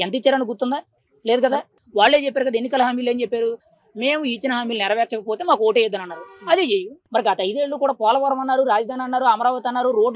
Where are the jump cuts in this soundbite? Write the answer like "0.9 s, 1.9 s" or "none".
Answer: 1.8 s, 7.0 s

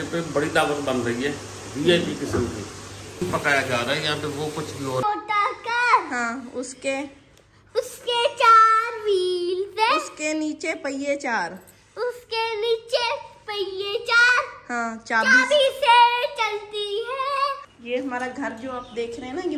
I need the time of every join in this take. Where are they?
3.2 s, 5.0 s, 17.6 s

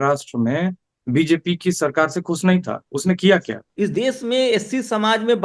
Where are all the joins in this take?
3.6 s

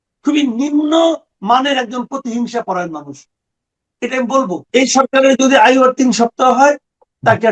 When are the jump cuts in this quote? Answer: 4.6 s

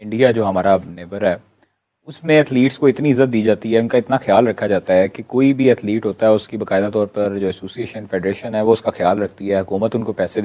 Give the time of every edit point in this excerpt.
none

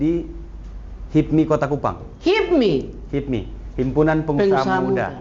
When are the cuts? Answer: none

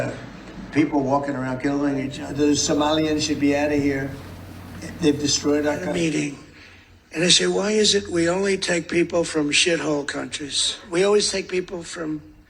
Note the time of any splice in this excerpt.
2.2 s, 5.9 s, 10.8 s

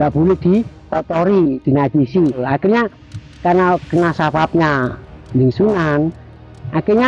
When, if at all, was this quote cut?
2.4 s

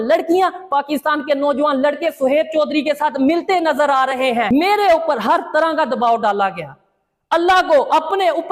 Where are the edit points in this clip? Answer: 4.5 s

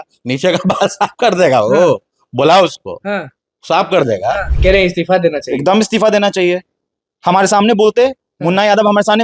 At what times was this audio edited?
4.5 s

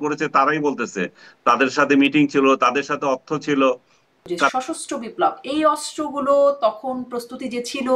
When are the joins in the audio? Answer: 4.5 s

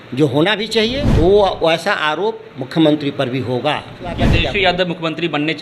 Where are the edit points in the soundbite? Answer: 1.0 s, 4.3 s

